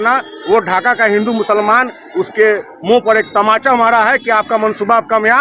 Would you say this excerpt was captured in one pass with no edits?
yes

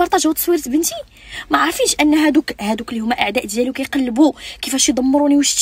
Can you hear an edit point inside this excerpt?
no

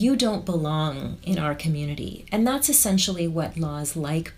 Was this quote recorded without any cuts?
yes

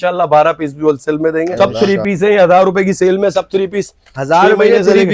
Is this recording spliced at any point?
yes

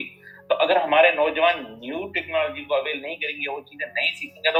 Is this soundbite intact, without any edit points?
yes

